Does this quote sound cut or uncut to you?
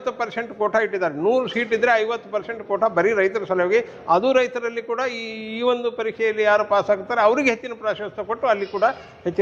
uncut